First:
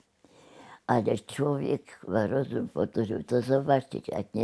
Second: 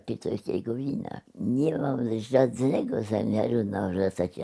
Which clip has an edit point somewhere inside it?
second; 1 cut; at 1.2 s

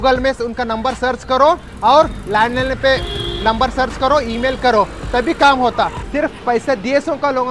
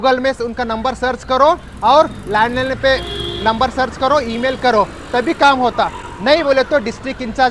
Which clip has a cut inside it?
first; 1 cut; at 6.0 s

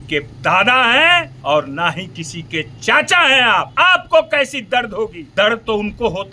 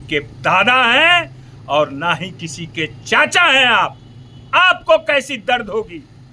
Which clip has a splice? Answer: first; 3 cuts; at 1.3 s, 3.7 s, 5.2 s

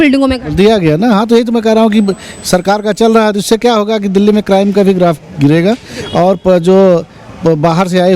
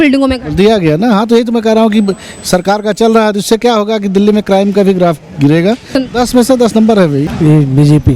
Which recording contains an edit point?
second; 2 cuts; at 6.0 s, 7.3 s

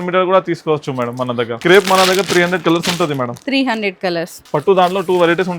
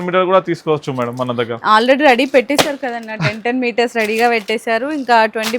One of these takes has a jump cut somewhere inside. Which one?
first; 2 cuts; at 1.5 s, 4.4 s

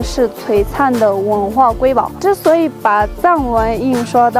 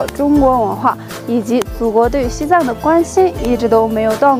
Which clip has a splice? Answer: first; 1 cut; at 2.1 s

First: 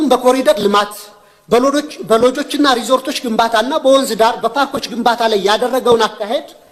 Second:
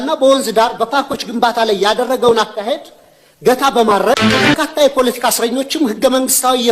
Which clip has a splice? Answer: second; 1 cut; at 4.6 s

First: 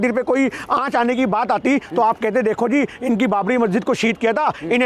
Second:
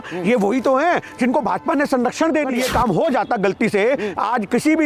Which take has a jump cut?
second; 1 cut; at 2.6 s

